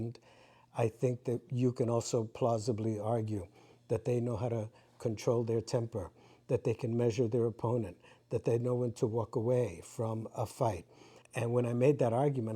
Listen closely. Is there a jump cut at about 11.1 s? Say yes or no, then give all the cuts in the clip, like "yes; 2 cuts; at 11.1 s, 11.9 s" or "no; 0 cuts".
yes; 1 cut; at 11.1 s